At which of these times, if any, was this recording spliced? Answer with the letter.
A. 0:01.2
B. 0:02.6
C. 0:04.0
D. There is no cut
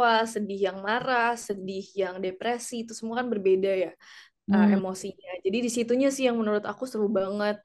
D